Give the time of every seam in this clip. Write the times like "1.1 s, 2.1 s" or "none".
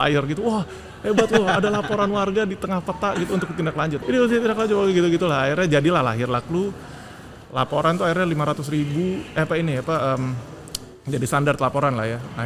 4.0 s